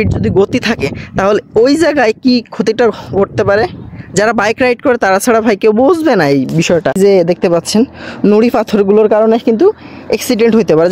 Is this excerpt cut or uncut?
cut